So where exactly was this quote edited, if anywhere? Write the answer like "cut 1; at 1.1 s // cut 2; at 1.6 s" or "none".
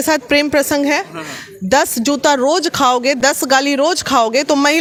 none